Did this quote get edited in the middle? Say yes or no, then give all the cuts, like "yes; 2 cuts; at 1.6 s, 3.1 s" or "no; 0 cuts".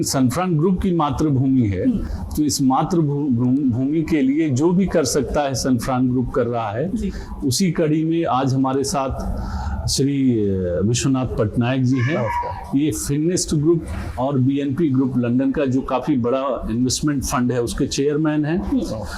no; 0 cuts